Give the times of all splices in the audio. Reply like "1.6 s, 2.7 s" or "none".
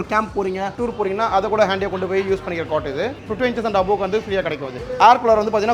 4.7 s